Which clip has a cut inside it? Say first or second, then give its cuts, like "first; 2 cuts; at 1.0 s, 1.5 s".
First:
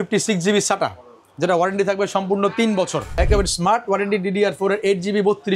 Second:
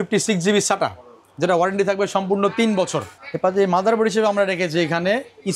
first; 1 cut; at 3.1 s